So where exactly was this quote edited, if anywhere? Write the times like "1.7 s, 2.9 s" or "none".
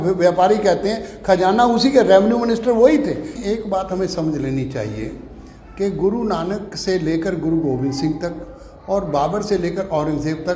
3.2 s